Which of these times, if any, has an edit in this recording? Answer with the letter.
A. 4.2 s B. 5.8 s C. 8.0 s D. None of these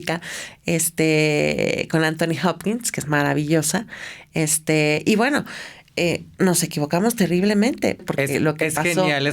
C